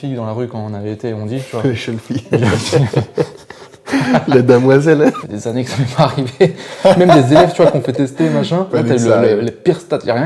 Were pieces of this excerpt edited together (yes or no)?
yes